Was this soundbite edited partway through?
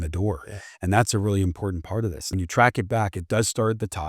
yes; 1 cut; at 2.2 s

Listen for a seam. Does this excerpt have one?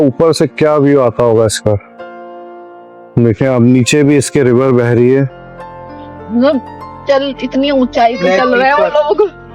no; 0 cuts

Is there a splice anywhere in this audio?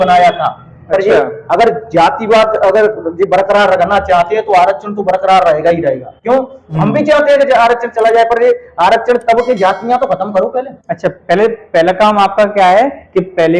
no; 0 cuts

